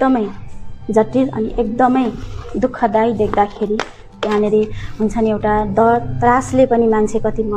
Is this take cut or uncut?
uncut